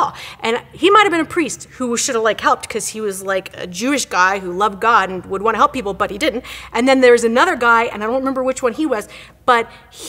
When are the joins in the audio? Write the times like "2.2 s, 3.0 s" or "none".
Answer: 6.5 s, 9.2 s